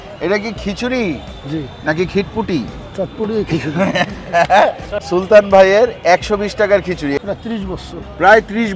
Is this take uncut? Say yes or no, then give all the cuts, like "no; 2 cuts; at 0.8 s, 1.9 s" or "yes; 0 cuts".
no; 2 cuts; at 4.9 s, 7.2 s